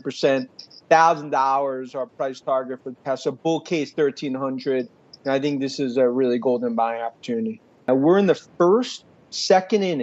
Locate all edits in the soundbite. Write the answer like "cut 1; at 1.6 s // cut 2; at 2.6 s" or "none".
cut 1; at 7.9 s